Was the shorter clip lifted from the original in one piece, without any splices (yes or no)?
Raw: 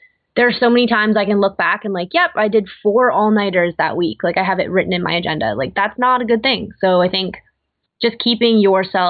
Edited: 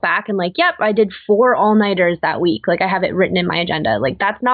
yes